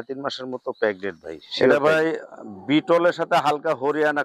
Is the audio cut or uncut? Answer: cut